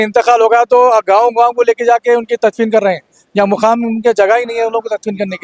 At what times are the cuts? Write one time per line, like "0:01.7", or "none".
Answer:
none